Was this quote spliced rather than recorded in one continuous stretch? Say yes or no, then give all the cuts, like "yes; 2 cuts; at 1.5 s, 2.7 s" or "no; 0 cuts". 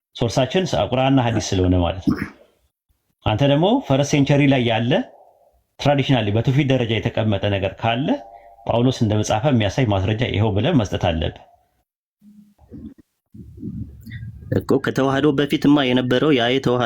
yes; 1 cut; at 12.6 s